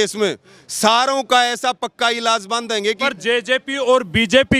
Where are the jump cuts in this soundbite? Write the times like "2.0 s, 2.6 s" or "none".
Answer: 3.0 s